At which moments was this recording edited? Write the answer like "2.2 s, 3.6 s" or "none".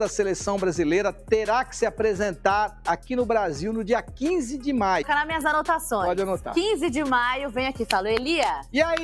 5.1 s